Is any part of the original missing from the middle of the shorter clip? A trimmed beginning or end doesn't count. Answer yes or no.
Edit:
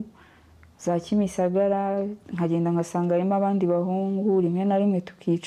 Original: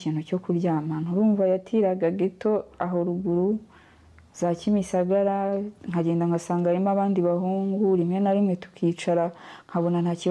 no